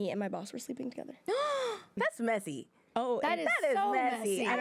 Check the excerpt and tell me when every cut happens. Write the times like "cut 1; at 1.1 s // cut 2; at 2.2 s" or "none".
cut 1; at 2.0 s